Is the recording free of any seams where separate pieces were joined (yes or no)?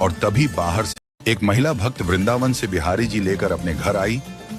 no